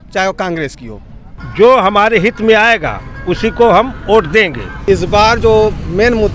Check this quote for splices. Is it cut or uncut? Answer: cut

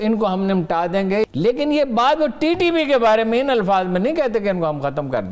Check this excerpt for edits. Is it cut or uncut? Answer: cut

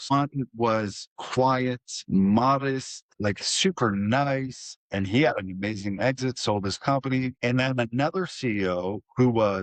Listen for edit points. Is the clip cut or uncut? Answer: uncut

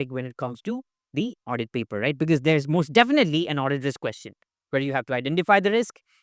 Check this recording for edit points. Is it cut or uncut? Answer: uncut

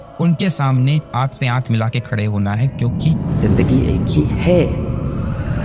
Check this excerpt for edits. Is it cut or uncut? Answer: uncut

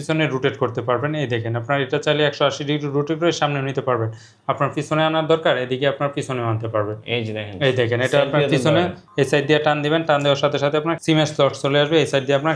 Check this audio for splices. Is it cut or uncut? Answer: cut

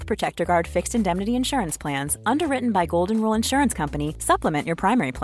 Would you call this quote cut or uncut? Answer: uncut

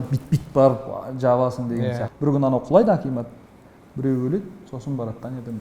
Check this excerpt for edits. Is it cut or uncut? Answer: cut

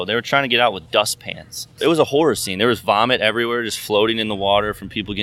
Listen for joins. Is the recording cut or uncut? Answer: cut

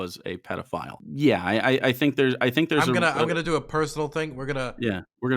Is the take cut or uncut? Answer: cut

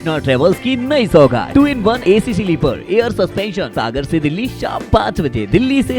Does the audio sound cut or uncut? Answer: cut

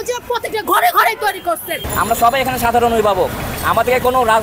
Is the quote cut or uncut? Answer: cut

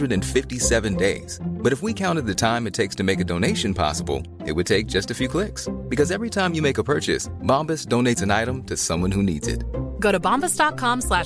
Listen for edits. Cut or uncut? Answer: uncut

